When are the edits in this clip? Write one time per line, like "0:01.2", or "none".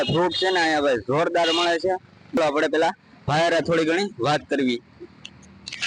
0:02.4